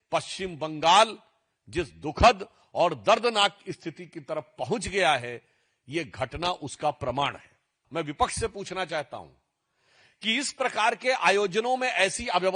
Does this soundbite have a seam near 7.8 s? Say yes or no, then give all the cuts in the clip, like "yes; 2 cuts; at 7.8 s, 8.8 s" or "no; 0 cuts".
yes; 1 cut; at 7.8 s